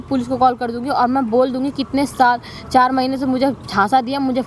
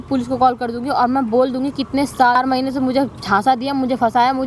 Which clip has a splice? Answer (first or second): second